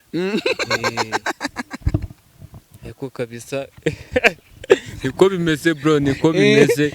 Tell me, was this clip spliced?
no; 0 cuts

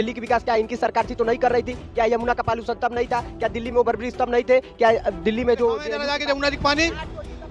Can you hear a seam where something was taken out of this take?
yes; 1 cut; at 5.9 s

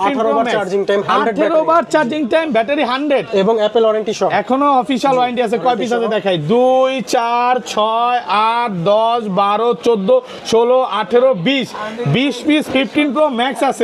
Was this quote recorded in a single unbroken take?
yes; 0 cuts

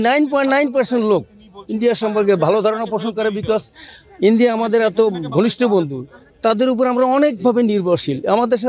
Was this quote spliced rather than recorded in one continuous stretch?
no; 0 cuts

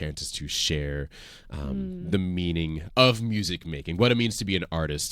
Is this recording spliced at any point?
yes; 1 cut; at 2.8 s

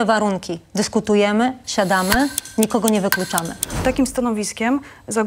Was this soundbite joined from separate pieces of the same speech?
yes; 1 cut; at 3.8 s

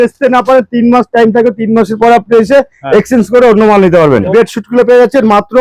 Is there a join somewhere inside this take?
yes; 1 cut; at 4.3 s

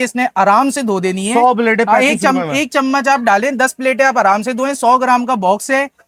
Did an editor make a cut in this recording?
no; 0 cuts

